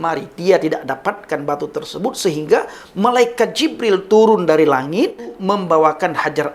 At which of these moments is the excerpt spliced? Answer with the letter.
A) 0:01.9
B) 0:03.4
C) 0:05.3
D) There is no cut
C